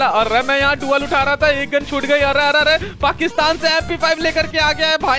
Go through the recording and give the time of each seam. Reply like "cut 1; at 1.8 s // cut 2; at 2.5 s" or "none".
none